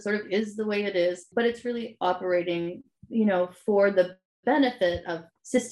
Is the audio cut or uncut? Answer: cut